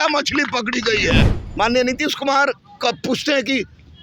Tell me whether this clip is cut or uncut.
cut